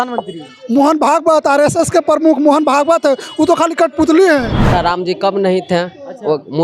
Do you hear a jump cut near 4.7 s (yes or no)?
yes